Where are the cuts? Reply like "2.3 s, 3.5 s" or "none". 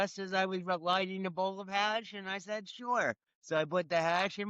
3.3 s